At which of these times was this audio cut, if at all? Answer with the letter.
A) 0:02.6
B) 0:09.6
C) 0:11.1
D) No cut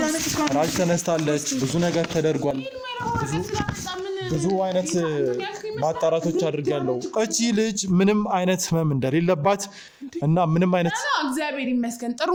D